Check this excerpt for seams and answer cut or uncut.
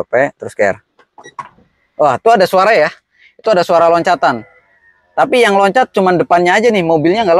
uncut